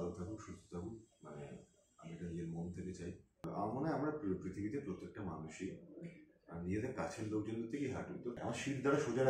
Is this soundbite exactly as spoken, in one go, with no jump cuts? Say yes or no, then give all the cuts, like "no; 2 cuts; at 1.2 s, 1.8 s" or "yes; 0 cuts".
no; 2 cuts; at 3.4 s, 8.4 s